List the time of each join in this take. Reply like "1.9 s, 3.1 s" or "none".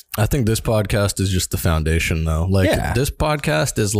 2.9 s